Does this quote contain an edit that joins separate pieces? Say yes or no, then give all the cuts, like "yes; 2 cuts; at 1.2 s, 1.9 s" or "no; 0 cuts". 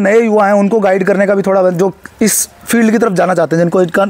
no; 0 cuts